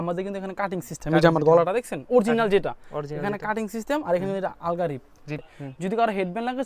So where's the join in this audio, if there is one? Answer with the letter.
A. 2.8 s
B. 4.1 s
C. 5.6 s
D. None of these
C